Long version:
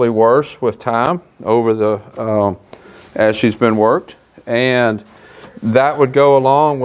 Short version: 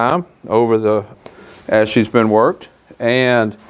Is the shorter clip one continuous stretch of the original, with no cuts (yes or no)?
no